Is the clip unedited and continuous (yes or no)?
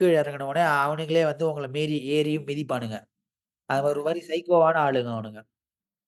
yes